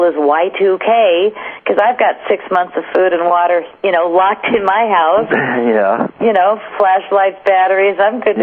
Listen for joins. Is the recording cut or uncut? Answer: uncut